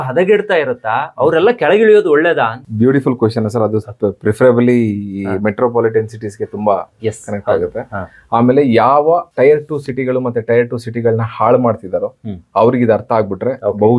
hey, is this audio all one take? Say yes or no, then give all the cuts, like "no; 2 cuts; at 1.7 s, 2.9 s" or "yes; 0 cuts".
yes; 0 cuts